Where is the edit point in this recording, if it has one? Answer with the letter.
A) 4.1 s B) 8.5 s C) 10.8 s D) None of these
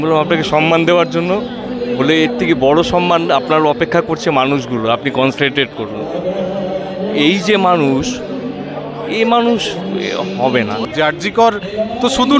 C